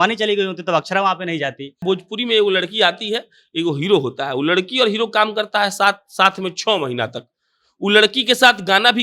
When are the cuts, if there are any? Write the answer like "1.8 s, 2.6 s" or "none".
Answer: 1.8 s